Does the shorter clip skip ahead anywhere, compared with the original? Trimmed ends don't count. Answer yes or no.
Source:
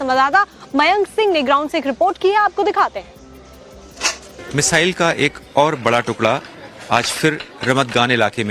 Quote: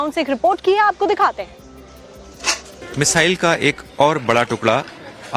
no